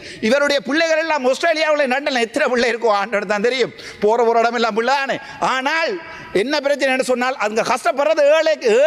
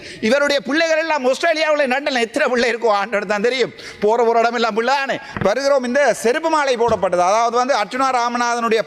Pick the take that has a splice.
second; 1 cut; at 5.2 s

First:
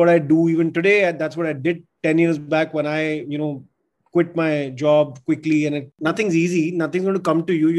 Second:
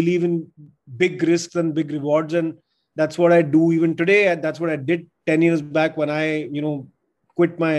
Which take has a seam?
first; 1 cut; at 5.9 s

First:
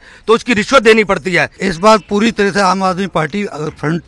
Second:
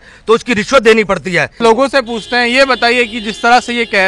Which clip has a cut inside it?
first; 1 cut; at 1.5 s

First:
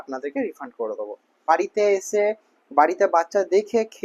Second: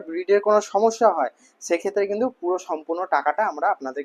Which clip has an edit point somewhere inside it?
first; 1 cut; at 1.5 s

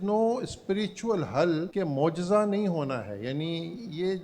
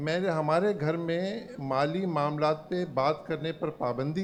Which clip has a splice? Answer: first; 1 cut; at 1.7 s

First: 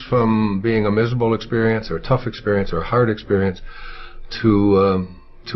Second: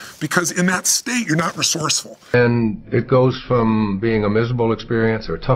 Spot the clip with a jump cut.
second; 1 cut; at 2.3 s

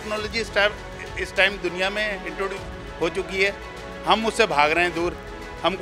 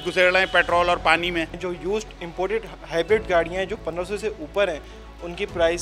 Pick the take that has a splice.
second; 1 cut; at 1.5 s

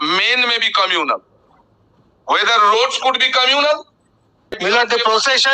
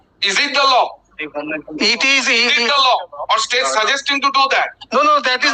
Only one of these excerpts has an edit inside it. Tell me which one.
first; 1 cut; at 4.6 s

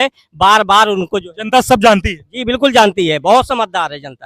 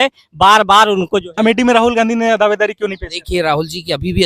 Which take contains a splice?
second; 1 cut; at 1.4 s

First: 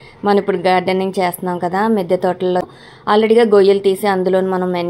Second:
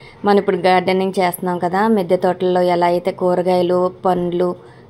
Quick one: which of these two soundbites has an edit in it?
first; 1 cut; at 2.6 s

